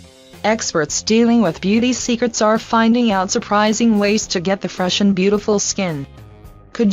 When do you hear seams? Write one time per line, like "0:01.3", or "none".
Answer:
0:04.0